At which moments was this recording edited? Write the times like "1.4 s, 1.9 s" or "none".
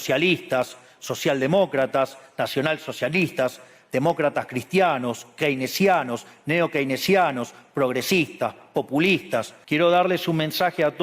9.5 s